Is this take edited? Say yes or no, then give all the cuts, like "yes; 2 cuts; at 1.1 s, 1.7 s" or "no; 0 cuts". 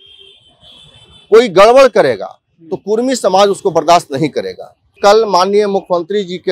yes; 1 cut; at 5.0 s